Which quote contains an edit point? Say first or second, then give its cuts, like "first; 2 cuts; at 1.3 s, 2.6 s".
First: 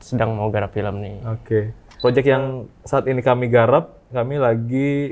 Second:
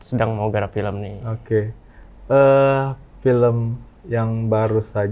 first; 1 cut; at 1.8 s